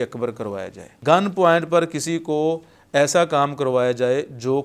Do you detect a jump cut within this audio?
yes; 1 cut; at 1.0 s

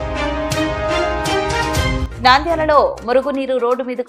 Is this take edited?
no; 0 cuts

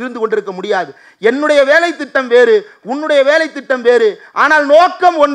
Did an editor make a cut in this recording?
no; 0 cuts

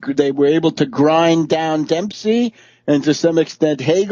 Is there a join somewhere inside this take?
yes; 1 cut; at 1.3 s

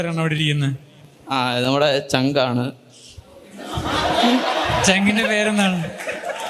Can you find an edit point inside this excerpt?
no; 0 cuts

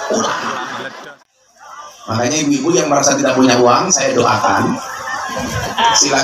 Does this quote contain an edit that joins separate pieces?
yes; 1 cut; at 1.2 s

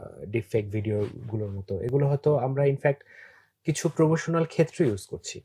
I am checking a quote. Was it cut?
no; 0 cuts

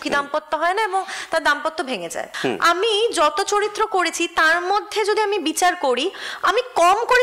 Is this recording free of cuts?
no; 1 cut; at 2.2 s

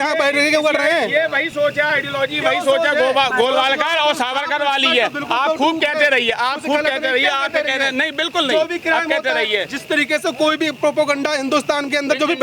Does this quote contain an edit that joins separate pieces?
no; 0 cuts

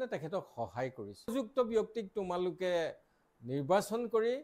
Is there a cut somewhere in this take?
yes; 1 cut; at 1.3 s

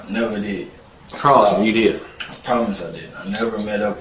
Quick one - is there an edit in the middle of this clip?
no; 0 cuts

